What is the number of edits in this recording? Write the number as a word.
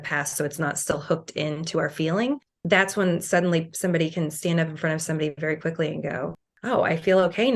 zero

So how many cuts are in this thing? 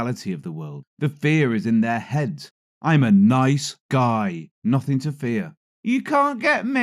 one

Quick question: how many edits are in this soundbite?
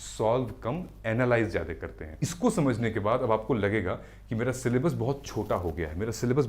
one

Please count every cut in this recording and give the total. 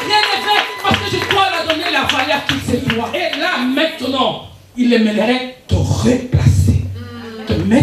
one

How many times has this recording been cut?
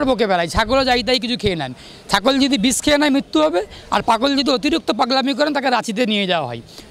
zero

